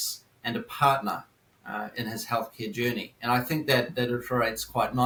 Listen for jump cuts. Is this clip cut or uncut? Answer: uncut